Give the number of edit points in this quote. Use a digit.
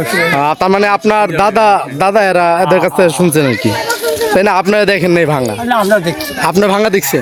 0